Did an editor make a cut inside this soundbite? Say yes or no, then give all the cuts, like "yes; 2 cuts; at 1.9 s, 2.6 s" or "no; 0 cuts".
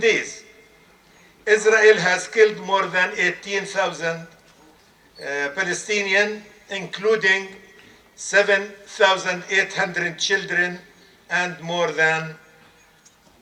no; 0 cuts